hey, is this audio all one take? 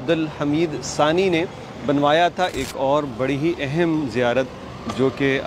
no; 1 cut; at 2.6 s

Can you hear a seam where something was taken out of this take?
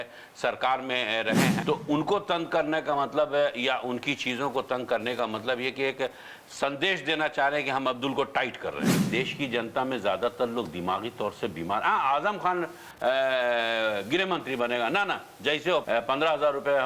yes; 3 cuts; at 1.6 s, 8.9 s, 15.8 s

